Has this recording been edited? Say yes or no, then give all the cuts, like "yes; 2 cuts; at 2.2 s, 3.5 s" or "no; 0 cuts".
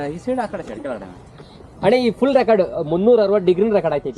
no; 0 cuts